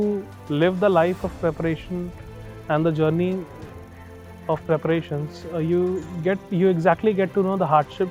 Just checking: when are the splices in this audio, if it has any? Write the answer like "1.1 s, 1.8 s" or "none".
none